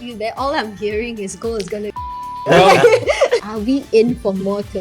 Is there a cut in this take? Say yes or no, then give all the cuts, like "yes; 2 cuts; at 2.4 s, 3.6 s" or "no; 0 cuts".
yes; 1 cut; at 3.4 s